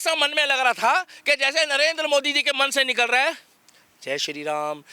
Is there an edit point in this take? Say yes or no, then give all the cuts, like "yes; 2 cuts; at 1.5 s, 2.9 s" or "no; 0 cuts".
no; 0 cuts